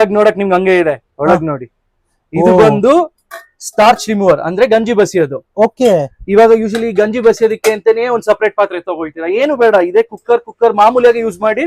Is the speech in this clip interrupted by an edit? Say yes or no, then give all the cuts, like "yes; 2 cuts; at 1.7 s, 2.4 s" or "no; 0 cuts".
no; 0 cuts